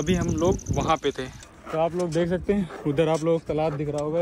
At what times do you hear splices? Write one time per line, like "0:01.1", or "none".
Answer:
0:01.4